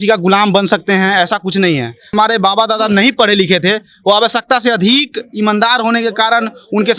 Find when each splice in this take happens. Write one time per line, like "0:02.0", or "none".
0:02.1